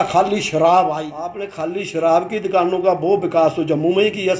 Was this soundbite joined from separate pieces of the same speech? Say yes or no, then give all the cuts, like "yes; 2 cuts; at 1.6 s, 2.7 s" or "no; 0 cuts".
yes; 1 cut; at 1.5 s